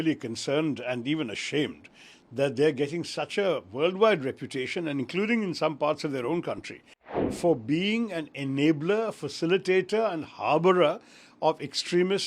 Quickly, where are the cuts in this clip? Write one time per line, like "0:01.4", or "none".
0:07.2